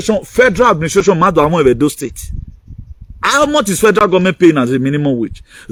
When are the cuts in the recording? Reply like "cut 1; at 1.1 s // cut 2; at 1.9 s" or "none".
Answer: none